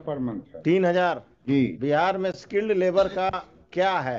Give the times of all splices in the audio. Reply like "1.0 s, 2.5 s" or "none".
1.8 s